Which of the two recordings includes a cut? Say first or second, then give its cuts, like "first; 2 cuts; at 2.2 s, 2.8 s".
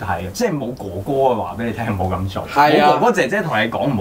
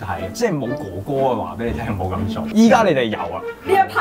second; 1 cut; at 2.5 s